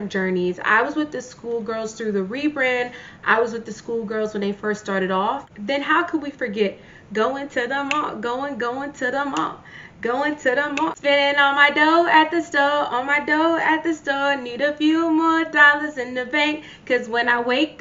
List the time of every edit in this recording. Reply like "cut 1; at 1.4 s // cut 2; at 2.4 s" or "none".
cut 1; at 5.5 s // cut 2; at 11.0 s